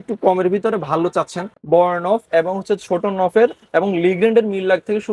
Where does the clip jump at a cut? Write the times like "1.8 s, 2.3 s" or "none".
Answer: 1.5 s